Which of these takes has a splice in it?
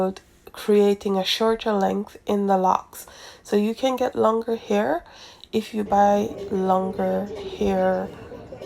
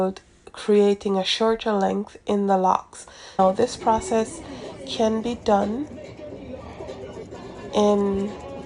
second; 1 cut; at 3.4 s

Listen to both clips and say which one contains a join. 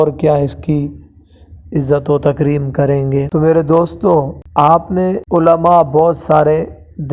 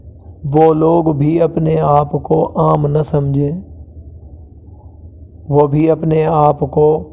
first; 3 cuts; at 3.3 s, 4.4 s, 5.2 s

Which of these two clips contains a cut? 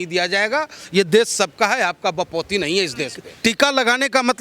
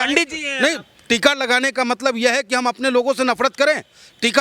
first; 1 cut; at 3.2 s

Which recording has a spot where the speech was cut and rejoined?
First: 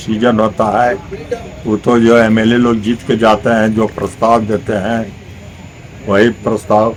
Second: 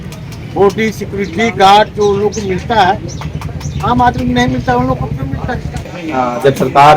second; 1 cut; at 5.7 s

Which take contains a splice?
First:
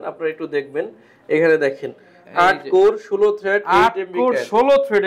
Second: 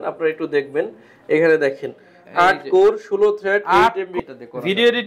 second; 1 cut; at 4.2 s

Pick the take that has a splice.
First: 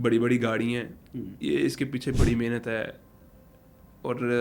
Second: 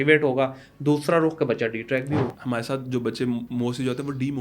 second; 1 cut; at 2.4 s

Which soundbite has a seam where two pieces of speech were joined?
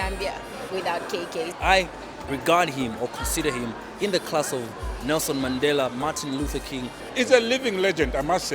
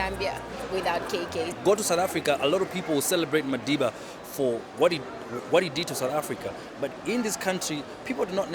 first; 2 cuts; at 1.5 s, 7.0 s

